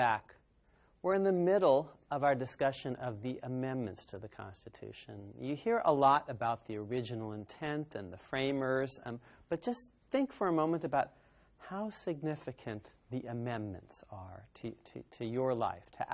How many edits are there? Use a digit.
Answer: 0